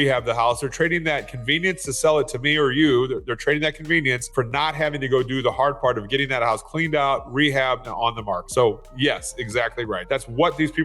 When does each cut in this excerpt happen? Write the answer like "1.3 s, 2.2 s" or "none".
4.2 s, 8.4 s, 10.0 s

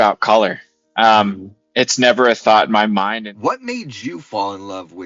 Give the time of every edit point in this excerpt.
3.1 s

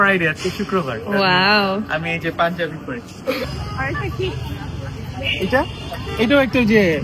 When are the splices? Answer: 3.5 s

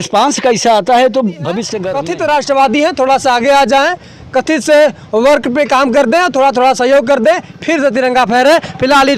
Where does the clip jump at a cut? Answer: 1.8 s

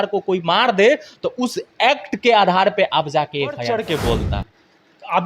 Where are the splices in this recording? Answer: 3.6 s

